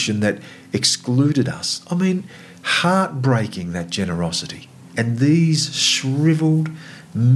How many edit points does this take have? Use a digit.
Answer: 1